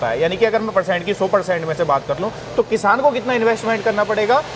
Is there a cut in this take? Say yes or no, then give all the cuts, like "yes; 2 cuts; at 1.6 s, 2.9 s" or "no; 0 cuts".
no; 0 cuts